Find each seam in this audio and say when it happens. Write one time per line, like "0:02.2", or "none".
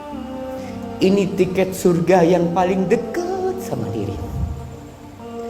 0:01.0